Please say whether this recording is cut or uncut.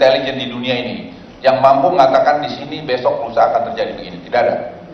cut